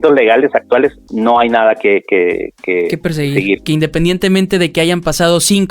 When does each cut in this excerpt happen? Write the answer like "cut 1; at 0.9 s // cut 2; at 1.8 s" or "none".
cut 1; at 1.0 s // cut 2; at 3.6 s